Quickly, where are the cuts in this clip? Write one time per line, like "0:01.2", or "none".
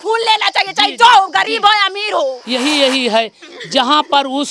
0:02.4